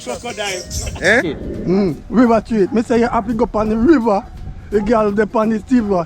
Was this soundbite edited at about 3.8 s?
no; 1 cut; at 1.7 s

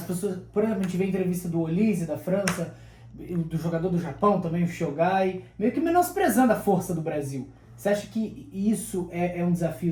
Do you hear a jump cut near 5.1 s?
no; 0 cuts

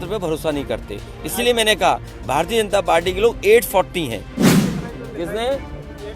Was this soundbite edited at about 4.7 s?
yes; 1 cut; at 4.7 s

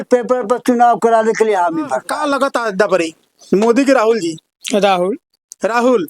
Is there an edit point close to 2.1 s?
yes; 1 cut; at 2.1 s

